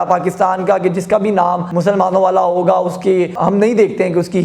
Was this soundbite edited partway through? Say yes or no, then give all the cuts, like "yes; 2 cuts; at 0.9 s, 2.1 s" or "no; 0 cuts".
yes; 2 cuts; at 1.7 s, 3.3 s